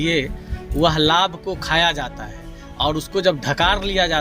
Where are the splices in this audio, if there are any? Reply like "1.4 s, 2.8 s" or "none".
none

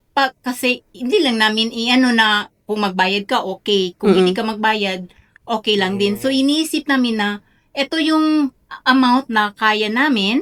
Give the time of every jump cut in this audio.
none

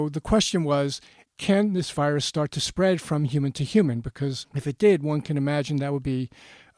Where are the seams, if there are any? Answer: none

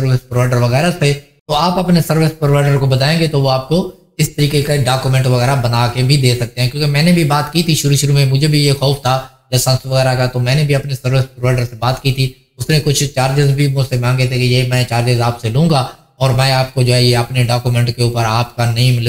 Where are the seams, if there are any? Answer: 1.3 s

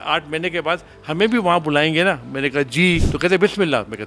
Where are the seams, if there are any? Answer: 3.1 s

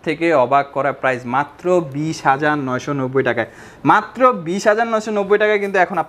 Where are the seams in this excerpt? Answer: none

